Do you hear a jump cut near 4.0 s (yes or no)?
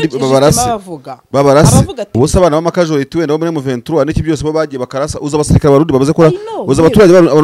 no